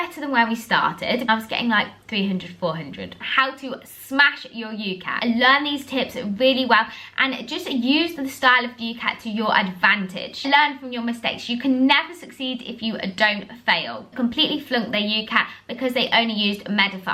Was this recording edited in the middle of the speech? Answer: yes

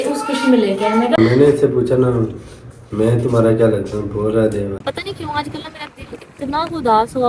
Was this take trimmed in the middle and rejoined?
yes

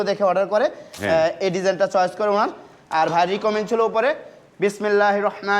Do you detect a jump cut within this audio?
no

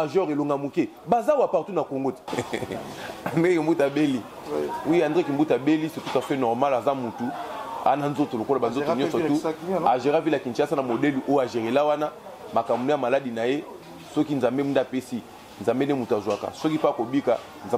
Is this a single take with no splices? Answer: no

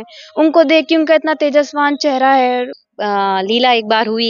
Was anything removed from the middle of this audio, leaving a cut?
yes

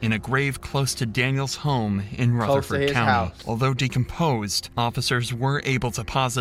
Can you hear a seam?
no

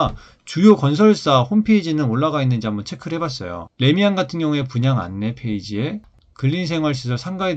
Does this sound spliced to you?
no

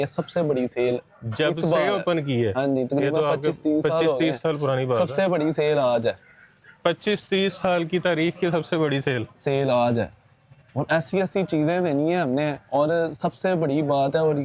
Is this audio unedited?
yes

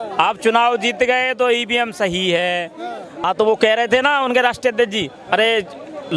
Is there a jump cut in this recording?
yes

